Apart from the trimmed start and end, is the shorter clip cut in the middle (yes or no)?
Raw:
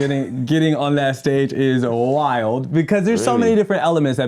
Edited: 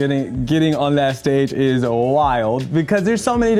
no